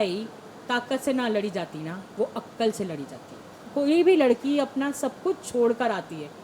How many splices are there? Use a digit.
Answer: 1